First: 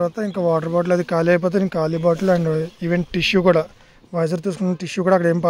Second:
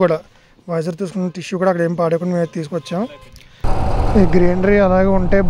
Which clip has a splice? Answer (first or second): second